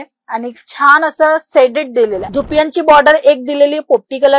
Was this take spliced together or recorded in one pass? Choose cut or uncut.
cut